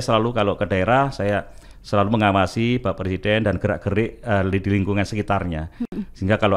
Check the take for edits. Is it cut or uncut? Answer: uncut